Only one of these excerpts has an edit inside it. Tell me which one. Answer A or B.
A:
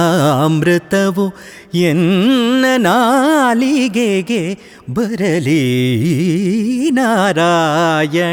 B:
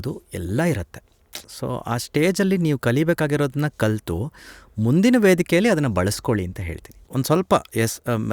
B